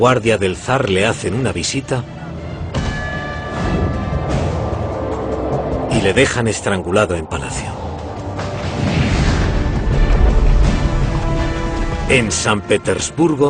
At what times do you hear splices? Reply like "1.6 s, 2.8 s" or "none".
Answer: 2.7 s